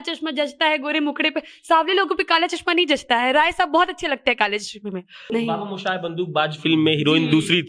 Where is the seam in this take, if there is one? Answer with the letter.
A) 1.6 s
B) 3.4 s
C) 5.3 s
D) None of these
C